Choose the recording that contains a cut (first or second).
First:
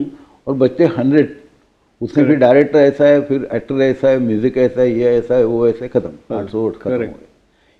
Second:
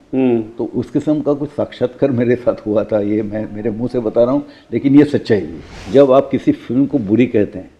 second